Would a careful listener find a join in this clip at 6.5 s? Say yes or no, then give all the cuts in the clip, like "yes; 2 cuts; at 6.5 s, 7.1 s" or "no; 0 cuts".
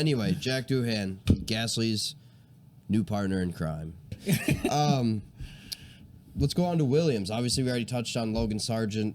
no; 1 cut; at 4.2 s